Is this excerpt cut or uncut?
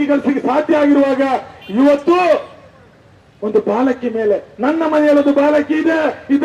uncut